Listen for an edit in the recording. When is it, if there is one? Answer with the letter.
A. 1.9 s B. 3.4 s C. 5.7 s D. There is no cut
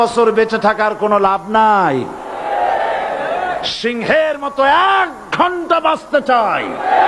D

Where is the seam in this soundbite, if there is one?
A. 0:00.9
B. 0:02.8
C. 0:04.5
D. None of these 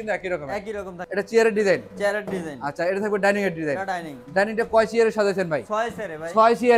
A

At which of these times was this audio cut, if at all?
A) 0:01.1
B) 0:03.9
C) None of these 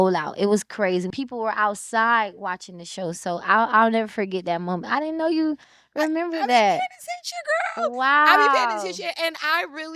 A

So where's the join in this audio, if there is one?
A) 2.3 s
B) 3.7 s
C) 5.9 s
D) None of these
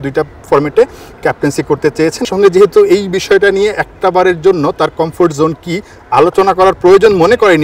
A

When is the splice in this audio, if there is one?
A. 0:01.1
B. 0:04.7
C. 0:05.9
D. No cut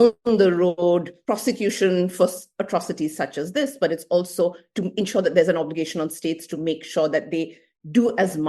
A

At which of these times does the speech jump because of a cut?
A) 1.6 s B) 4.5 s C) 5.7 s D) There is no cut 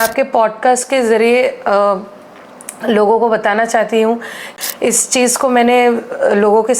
B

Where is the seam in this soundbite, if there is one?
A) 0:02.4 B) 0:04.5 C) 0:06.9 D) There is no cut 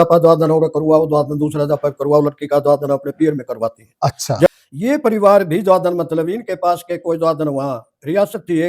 B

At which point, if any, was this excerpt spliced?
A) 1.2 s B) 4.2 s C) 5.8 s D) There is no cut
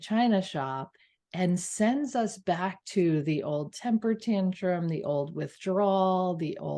D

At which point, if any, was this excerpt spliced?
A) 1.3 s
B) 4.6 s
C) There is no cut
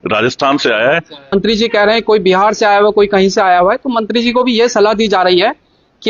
A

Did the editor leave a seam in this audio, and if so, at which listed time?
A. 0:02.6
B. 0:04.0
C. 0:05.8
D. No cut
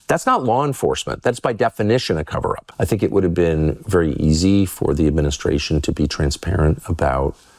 A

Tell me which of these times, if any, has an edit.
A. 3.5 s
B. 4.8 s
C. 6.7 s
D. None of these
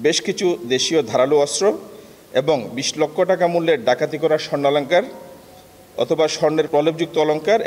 C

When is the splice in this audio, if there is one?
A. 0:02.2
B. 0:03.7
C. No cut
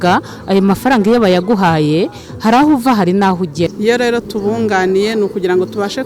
B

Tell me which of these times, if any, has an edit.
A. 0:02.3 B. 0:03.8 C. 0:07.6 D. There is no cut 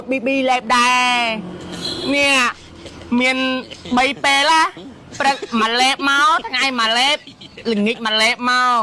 D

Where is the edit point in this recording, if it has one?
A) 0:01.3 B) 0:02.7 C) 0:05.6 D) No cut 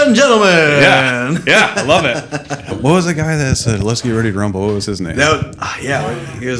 B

